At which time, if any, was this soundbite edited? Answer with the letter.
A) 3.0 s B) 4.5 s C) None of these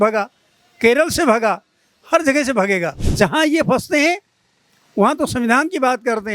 A